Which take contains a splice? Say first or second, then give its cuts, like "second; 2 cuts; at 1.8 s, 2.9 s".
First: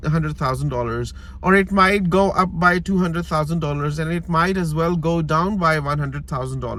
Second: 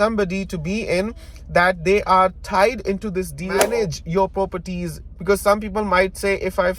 second; 1 cut; at 3.6 s